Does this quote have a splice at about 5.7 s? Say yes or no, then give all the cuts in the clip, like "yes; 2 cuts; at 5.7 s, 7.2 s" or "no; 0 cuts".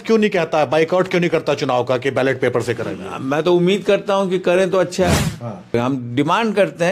yes; 1 cut; at 5.7 s